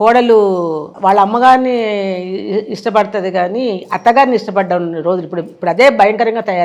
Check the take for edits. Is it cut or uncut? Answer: cut